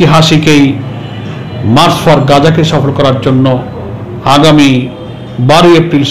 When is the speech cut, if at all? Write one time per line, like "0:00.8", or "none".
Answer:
none